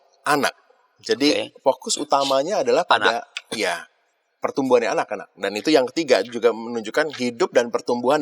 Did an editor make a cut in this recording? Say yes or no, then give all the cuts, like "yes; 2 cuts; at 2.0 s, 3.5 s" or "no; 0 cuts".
no; 0 cuts